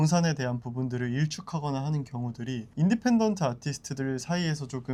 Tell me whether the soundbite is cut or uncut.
uncut